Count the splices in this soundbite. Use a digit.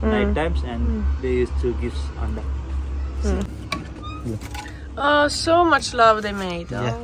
1